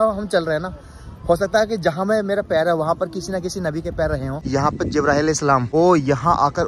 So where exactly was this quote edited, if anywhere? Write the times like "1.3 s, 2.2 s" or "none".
4.3 s, 5.7 s